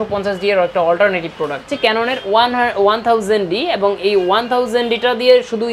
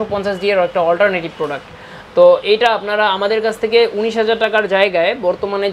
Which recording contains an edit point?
first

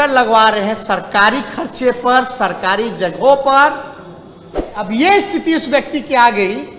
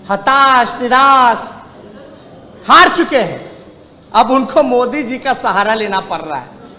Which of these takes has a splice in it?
first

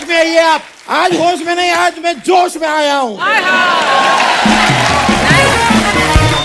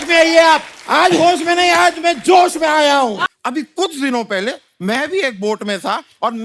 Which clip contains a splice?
second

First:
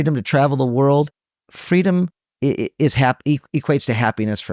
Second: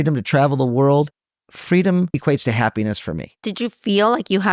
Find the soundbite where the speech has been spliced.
second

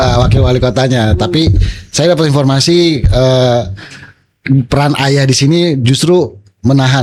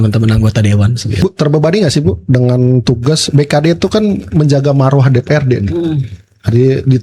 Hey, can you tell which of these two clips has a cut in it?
second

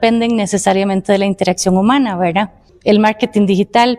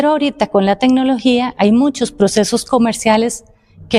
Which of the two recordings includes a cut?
first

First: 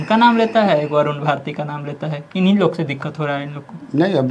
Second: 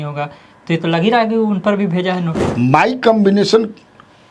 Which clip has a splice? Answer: second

